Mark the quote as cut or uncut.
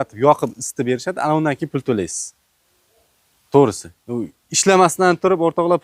uncut